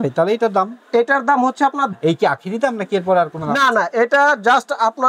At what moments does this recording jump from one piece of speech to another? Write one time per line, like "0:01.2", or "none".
0:01.9